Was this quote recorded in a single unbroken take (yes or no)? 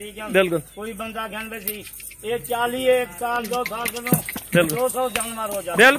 yes